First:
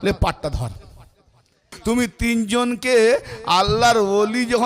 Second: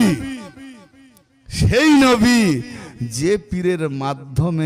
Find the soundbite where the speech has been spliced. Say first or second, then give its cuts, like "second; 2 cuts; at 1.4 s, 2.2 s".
first; 1 cut; at 1.6 s